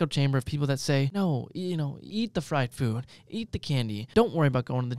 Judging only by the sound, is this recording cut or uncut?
cut